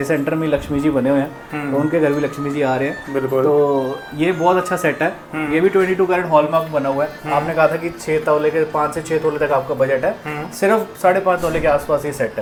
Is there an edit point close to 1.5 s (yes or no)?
no